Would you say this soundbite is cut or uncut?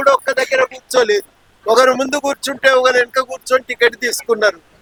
uncut